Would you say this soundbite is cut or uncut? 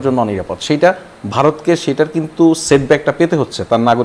uncut